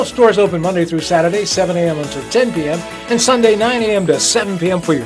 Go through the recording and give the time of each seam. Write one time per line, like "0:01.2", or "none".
none